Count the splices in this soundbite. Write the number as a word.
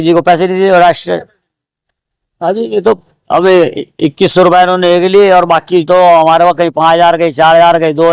zero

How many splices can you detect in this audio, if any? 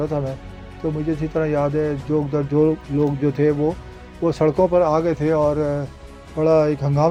zero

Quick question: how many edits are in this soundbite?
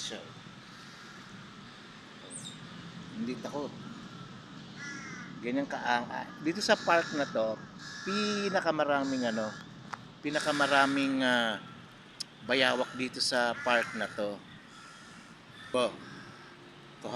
one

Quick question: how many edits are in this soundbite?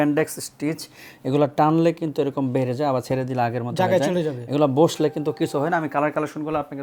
zero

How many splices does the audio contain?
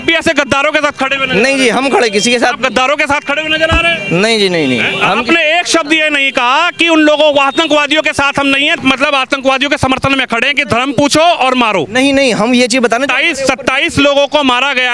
one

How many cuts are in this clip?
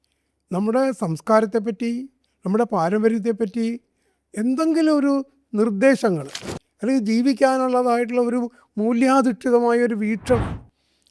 zero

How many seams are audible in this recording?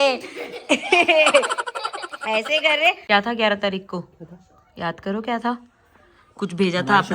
one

